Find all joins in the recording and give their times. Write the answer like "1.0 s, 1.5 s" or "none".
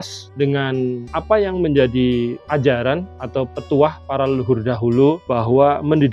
1.1 s, 5.2 s